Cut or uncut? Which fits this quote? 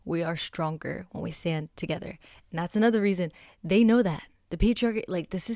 uncut